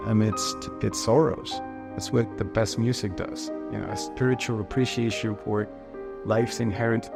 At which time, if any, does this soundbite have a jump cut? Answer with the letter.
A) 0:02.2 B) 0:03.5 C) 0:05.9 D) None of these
D